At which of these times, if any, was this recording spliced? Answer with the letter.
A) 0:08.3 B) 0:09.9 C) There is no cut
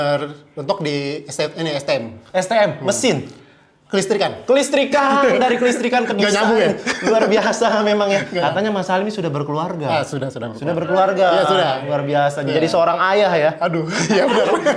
A